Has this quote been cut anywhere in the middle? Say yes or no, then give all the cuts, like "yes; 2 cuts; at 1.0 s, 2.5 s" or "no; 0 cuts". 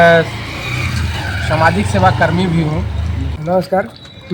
yes; 1 cut; at 3.3 s